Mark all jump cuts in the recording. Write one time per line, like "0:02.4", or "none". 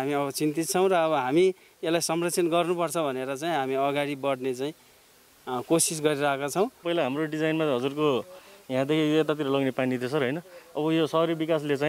0:06.8